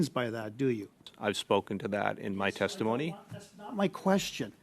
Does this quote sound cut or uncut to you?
cut